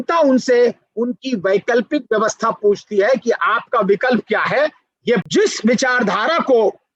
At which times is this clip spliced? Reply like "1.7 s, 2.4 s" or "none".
5.2 s